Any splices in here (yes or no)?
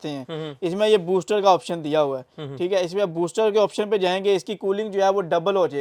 no